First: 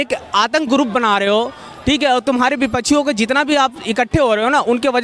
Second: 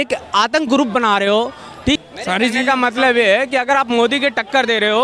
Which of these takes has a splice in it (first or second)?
second